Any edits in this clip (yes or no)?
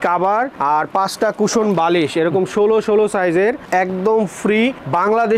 no